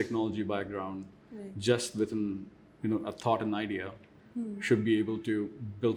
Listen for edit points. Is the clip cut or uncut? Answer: uncut